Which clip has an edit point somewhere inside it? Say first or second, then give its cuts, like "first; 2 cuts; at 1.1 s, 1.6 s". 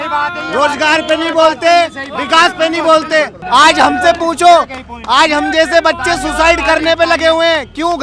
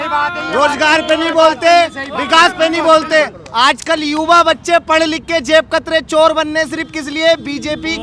first; 1 cut; at 3.4 s